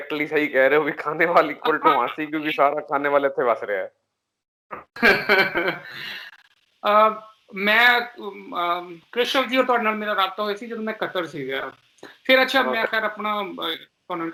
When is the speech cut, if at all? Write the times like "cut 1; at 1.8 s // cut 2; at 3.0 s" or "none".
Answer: none